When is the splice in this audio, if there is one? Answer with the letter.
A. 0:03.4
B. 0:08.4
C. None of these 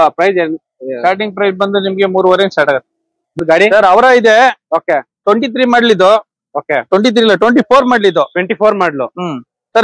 A